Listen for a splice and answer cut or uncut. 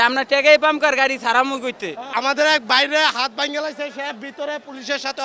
cut